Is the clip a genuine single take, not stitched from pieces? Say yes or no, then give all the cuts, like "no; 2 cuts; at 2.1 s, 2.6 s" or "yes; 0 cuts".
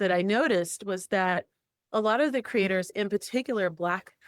no; 1 cut; at 2.9 s